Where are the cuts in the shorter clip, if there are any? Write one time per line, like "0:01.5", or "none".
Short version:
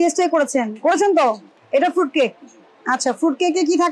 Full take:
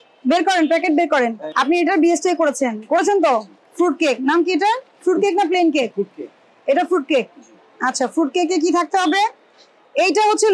0:01.5